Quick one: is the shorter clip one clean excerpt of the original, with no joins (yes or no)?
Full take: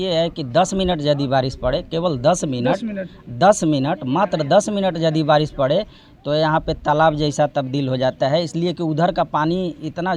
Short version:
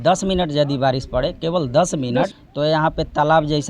no